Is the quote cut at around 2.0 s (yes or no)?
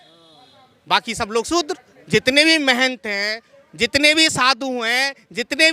yes